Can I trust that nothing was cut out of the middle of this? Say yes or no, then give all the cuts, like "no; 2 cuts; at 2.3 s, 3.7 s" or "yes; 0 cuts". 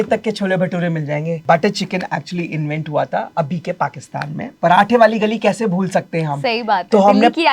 no; 2 cuts; at 1.4 s, 4.5 s